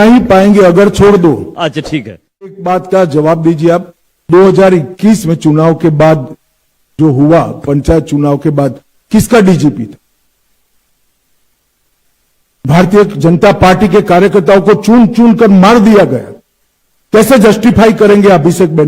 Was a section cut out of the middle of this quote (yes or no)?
yes